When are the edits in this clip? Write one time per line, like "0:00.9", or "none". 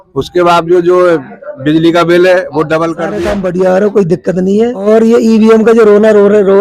0:03.2
0:04.8